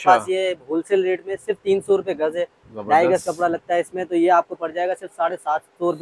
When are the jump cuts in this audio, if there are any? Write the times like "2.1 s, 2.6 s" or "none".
none